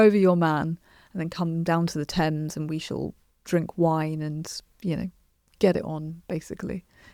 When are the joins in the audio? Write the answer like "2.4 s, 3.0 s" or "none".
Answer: none

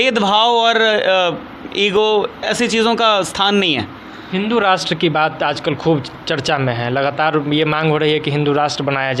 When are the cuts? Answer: none

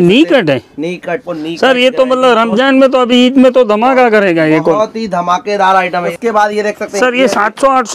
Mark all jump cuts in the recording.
1.3 s, 6.1 s

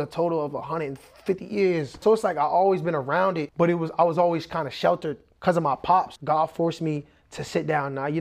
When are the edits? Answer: 2.0 s, 3.5 s, 6.1 s

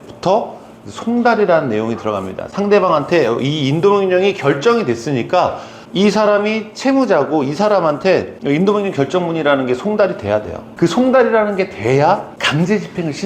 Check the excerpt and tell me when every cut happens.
12.3 s

